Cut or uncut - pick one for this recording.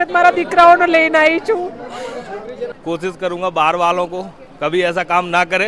cut